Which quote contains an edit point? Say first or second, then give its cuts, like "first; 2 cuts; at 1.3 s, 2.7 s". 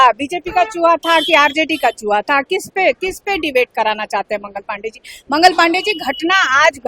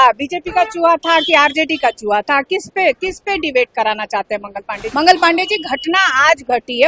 second; 1 cut; at 4.8 s